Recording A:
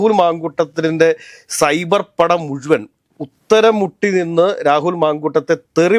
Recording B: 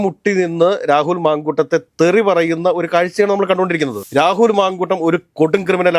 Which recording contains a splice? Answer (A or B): B